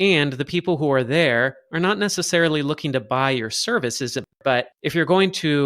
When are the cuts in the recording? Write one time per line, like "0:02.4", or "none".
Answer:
0:04.3